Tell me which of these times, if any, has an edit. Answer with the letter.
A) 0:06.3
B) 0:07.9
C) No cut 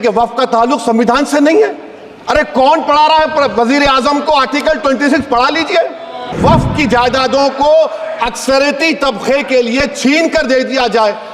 A